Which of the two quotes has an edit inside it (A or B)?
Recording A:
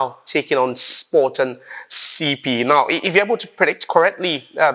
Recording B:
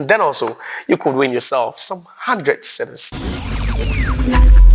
B